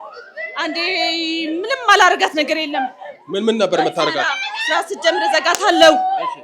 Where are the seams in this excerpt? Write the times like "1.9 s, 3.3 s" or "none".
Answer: none